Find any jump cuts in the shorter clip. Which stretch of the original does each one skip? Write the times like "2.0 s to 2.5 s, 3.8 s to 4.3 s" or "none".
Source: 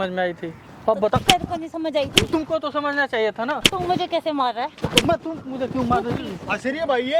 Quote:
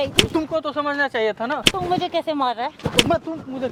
none